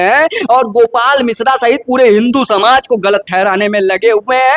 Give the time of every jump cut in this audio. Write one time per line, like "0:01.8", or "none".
none